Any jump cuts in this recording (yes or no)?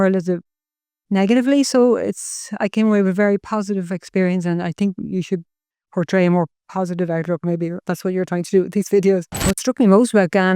yes